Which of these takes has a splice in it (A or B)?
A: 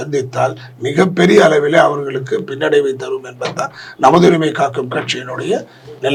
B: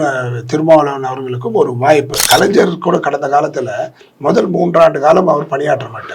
B